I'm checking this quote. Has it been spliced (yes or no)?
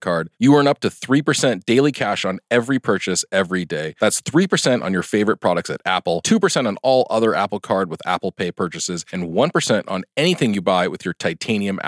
no